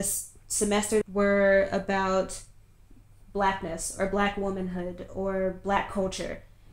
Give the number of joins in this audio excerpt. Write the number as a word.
one